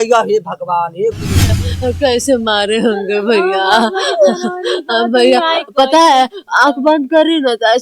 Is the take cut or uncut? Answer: cut